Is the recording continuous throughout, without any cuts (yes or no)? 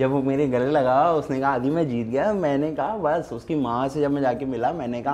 yes